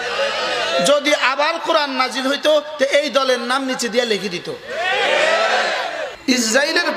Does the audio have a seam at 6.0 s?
yes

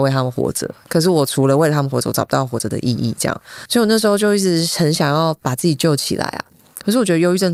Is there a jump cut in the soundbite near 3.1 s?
no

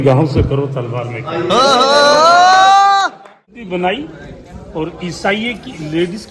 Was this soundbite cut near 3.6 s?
no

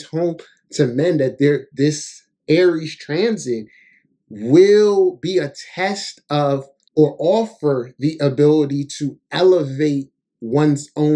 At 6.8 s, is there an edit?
yes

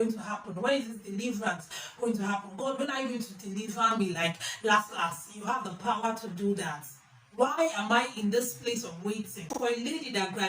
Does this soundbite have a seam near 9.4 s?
yes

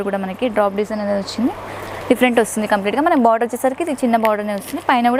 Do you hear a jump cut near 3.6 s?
no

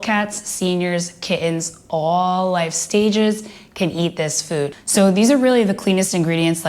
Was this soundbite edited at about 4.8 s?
yes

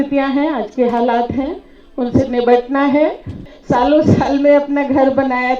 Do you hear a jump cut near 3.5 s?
yes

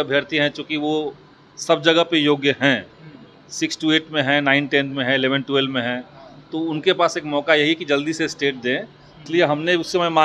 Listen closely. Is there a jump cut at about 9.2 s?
yes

